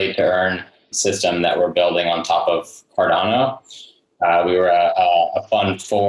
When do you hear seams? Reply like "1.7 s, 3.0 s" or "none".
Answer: 1.0 s